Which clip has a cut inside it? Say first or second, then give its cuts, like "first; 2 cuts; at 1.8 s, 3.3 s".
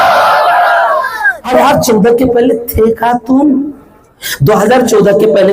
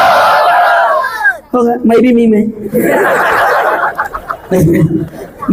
first; 1 cut; at 1.5 s